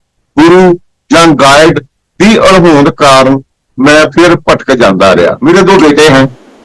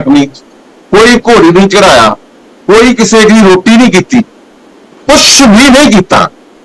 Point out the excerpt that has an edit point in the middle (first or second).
first